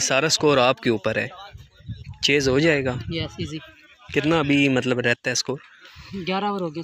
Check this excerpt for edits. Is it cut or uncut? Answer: uncut